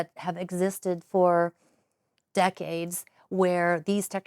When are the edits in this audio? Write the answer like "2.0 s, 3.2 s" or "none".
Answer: none